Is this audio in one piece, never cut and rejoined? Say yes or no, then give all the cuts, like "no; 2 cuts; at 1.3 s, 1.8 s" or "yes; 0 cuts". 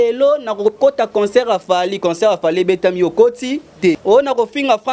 no; 1 cut; at 4.0 s